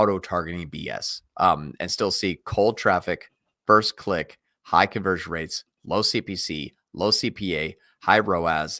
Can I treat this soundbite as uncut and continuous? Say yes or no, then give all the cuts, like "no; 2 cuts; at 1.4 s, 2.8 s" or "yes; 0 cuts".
yes; 0 cuts